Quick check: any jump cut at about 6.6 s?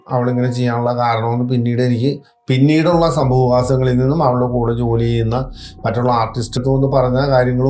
yes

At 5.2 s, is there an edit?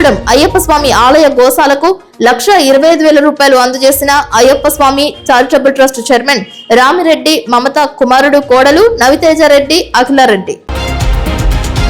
no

